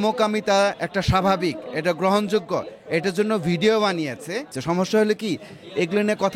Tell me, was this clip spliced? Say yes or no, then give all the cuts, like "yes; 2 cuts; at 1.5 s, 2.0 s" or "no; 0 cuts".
yes; 1 cut; at 4.6 s